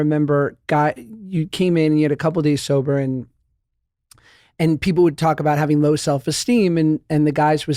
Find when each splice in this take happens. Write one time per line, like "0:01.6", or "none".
none